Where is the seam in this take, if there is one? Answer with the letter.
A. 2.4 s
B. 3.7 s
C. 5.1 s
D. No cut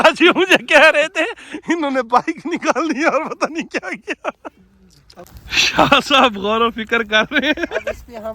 C